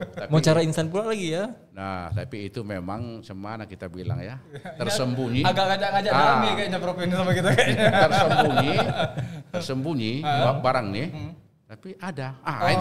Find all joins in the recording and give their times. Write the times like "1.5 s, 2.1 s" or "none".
none